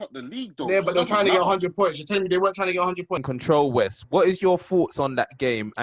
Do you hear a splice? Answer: yes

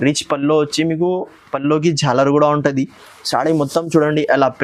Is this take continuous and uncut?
yes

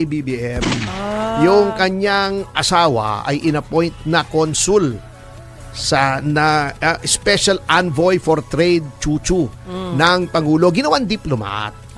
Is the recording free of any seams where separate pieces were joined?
yes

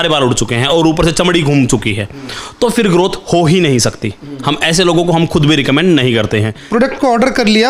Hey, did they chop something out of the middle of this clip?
yes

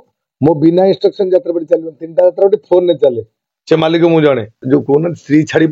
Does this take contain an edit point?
yes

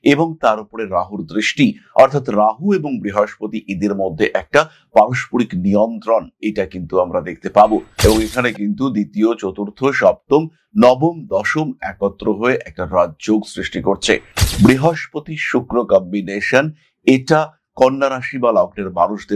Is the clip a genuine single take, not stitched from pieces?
no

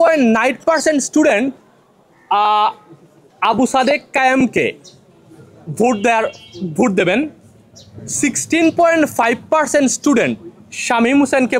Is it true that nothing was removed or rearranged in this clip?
yes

